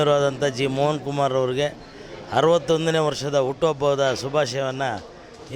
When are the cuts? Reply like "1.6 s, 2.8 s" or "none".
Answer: none